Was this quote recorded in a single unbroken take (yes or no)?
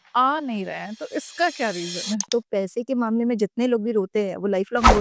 no